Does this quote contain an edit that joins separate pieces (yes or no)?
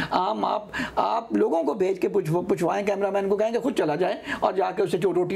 no